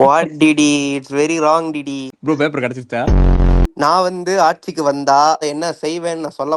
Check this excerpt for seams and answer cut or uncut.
uncut